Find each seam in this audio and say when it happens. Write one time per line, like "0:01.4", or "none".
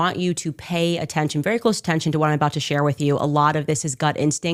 none